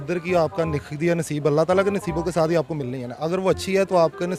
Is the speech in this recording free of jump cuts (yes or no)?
yes